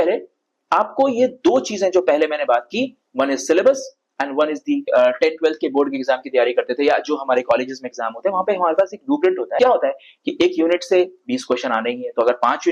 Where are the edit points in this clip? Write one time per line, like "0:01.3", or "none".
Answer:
0:04.9
0:09.6